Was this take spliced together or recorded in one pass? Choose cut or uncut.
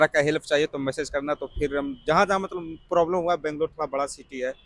uncut